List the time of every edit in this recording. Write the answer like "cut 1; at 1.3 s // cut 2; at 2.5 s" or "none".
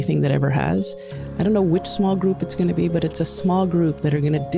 cut 1; at 1.2 s